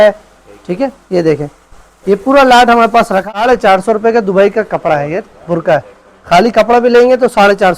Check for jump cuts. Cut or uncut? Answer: cut